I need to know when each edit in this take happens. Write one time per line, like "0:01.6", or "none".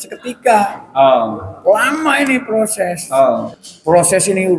0:03.4